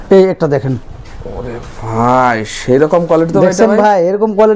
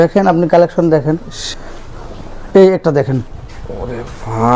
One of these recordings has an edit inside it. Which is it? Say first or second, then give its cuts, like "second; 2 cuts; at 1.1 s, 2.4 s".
second; 1 cut; at 1.4 s